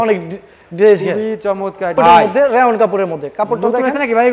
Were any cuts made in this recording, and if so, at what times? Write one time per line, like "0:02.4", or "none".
0:02.0